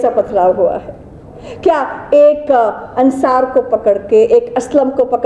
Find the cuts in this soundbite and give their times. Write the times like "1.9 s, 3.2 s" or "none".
none

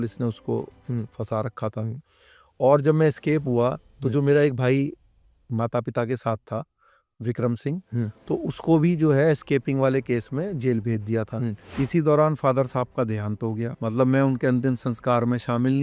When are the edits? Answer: 11.5 s, 13.7 s

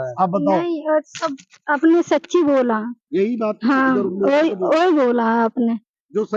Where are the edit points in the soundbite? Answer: none

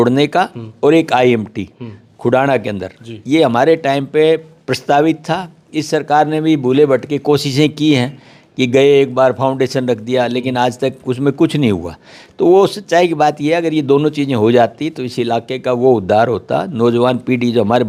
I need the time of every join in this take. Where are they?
none

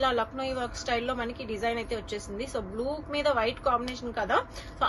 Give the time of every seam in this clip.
none

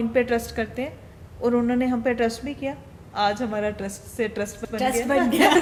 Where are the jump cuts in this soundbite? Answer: none

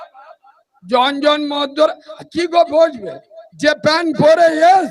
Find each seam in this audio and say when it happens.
none

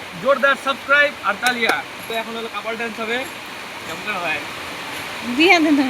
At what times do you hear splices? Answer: 2.1 s

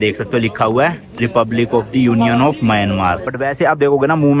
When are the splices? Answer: 3.3 s

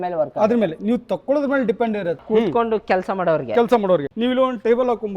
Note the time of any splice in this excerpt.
2.2 s, 4.1 s

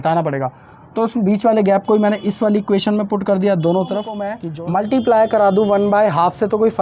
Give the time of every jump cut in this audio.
4.4 s

